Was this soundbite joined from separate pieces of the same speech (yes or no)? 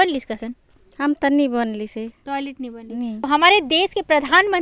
yes